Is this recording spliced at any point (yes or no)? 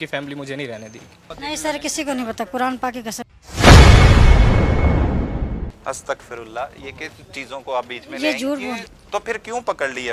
yes